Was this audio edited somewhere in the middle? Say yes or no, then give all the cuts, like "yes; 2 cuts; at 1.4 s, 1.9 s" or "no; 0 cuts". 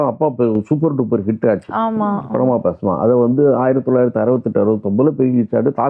no; 0 cuts